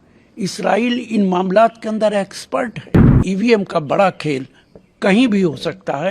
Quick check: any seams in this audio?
yes; 1 cut; at 3.2 s

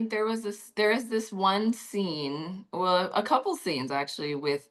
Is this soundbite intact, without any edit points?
yes; 0 cuts

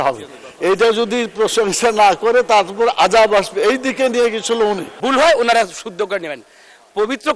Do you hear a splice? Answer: yes; 1 cut; at 4.9 s

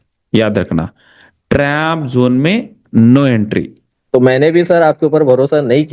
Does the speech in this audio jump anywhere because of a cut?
yes; 1 cut; at 3.9 s

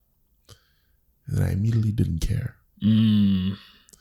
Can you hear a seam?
no; 0 cuts

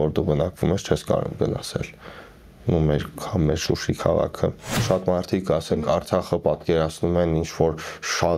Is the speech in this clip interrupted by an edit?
yes; 1 cut; at 4.8 s

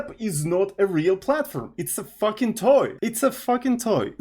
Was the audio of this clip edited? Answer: yes; 1 cut; at 2.9 s

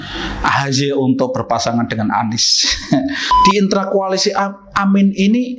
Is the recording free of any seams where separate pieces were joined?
no; 1 cut; at 3.3 s

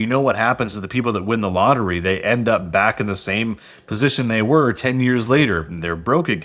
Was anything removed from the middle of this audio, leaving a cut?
no; 0 cuts

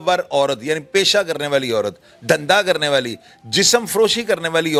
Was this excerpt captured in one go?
yes; 0 cuts

